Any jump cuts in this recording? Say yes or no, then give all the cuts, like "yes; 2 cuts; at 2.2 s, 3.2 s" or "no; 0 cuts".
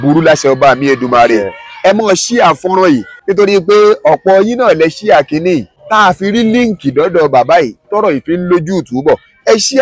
yes; 2 cuts; at 3.2 s, 5.8 s